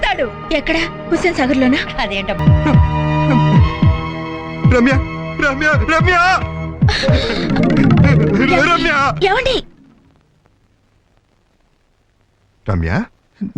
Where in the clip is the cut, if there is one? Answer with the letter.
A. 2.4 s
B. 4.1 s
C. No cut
A